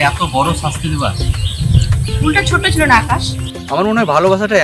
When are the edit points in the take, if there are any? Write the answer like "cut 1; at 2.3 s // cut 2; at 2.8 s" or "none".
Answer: cut 1; at 3.7 s